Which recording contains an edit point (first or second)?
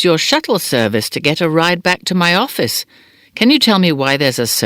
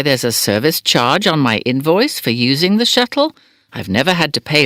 first